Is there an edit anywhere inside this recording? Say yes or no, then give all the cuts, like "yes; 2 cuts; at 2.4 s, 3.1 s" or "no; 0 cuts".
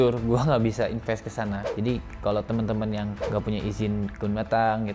yes; 1 cut; at 1.6 s